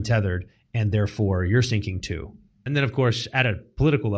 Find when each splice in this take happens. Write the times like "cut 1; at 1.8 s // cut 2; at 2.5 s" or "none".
cut 1; at 2.6 s